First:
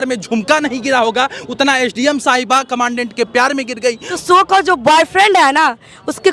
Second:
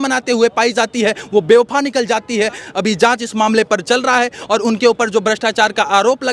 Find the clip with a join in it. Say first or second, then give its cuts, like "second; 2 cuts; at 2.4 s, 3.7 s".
first; 1 cut; at 4.1 s